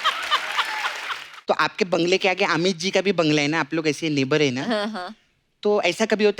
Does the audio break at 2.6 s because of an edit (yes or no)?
no